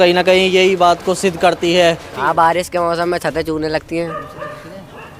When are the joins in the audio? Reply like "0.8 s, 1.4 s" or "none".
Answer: 2.1 s